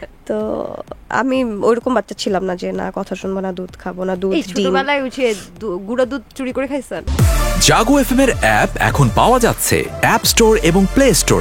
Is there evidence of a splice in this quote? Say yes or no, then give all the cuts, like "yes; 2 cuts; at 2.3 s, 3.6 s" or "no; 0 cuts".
yes; 1 cut; at 7.0 s